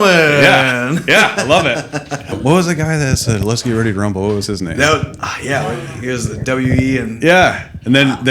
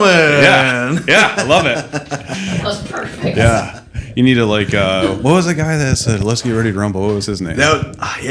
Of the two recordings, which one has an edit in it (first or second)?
first